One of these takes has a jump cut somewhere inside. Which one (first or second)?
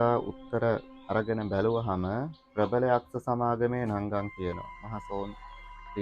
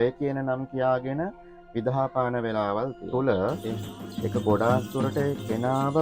second